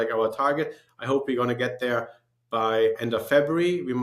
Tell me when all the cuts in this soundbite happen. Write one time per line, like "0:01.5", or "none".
0:03.0